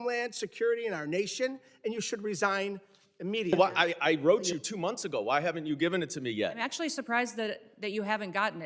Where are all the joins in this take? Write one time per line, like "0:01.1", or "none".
0:03.5